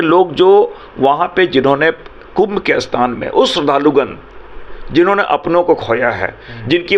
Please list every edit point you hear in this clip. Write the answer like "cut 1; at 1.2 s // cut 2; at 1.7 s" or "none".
none

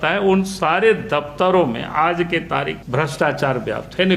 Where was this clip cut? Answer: cut 1; at 2.8 s

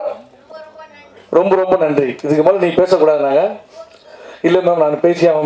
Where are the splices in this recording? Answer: none

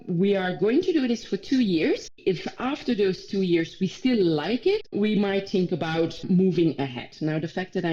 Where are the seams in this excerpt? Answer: cut 1; at 2.1 s // cut 2; at 4.9 s // cut 3; at 6.3 s

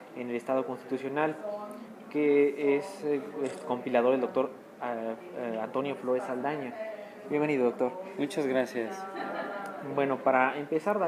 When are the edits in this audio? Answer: cut 1; at 5.9 s

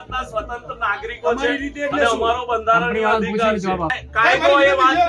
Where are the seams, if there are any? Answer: cut 1; at 4.0 s

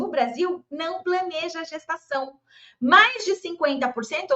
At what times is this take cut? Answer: none

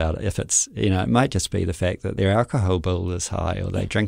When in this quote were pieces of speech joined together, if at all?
cut 1; at 2.1 s

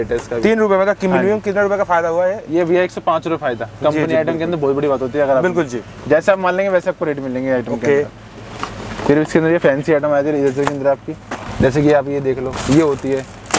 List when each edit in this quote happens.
none

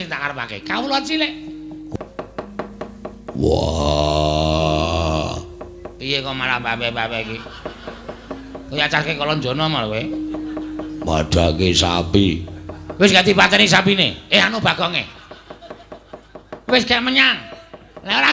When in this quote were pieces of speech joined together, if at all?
cut 1; at 1.8 s

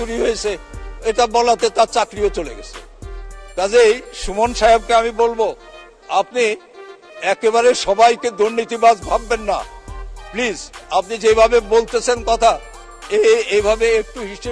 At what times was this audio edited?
none

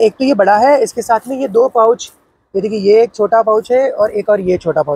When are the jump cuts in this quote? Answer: none

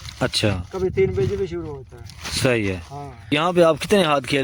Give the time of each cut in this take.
cut 1; at 3.3 s

